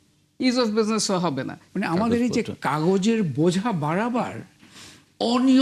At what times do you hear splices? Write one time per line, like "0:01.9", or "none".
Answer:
0:01.6